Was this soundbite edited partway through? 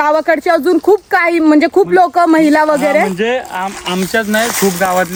no; 0 cuts

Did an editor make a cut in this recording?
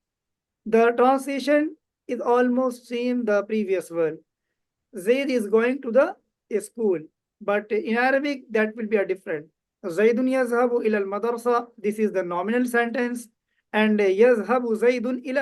no; 0 cuts

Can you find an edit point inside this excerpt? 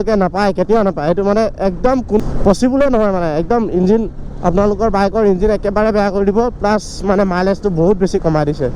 yes; 1 cut; at 2.2 s

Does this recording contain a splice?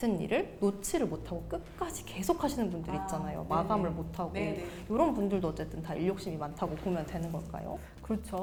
no; 0 cuts

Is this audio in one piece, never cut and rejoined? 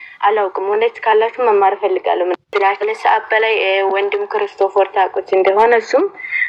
no; 1 cut; at 2.5 s

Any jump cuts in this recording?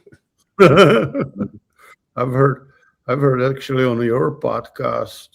no; 0 cuts

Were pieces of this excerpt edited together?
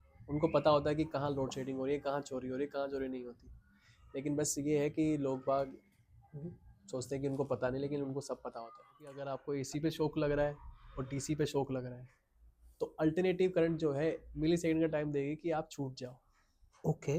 yes; 1 cut; at 9.3 s

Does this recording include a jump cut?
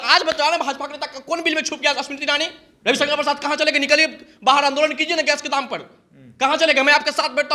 no; 0 cuts

